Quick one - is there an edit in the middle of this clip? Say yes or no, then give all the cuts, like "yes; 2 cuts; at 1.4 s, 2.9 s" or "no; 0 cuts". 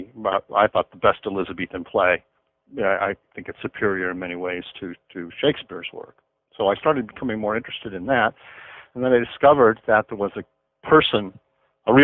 no; 0 cuts